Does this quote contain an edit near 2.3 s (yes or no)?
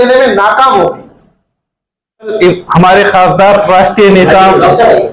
yes